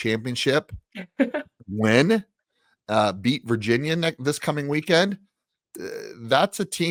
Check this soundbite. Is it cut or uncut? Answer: uncut